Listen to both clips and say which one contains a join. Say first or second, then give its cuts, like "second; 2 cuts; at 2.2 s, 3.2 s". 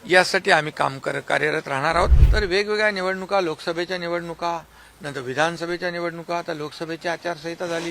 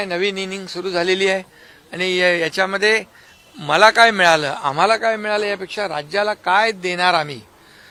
first; 1 cut; at 2.2 s